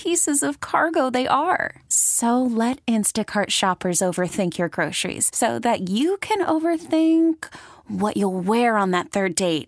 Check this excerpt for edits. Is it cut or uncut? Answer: uncut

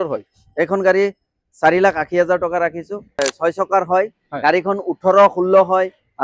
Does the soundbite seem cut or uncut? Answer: cut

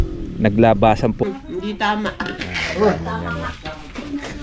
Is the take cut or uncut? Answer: cut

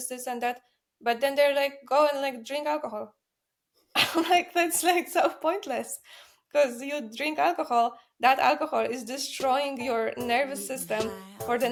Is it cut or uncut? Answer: uncut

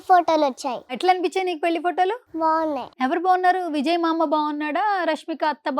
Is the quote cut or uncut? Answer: cut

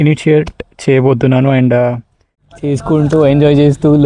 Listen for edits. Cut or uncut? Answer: cut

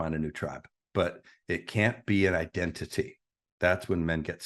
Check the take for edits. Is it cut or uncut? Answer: uncut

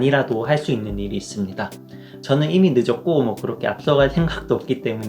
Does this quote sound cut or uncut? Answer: cut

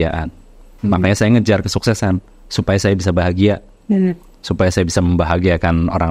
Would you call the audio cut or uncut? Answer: uncut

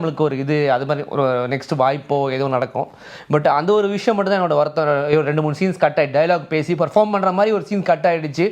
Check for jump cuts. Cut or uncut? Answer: uncut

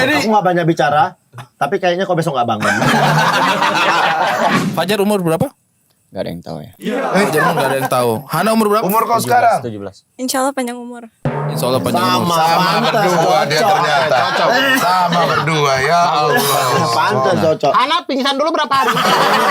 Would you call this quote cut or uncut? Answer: cut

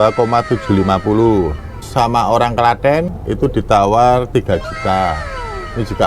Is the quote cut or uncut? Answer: cut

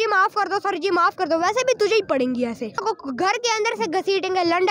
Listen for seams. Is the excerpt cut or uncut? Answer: cut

